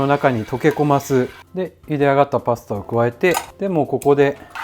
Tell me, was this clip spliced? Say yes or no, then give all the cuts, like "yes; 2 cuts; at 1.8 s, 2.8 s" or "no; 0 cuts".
yes; 2 cuts; at 1.4 s, 3.5 s